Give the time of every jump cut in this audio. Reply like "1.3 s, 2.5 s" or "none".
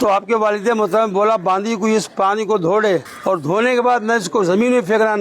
3.1 s